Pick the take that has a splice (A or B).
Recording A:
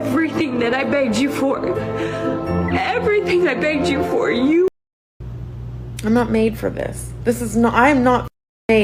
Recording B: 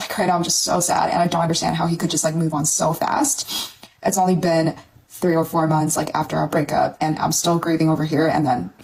A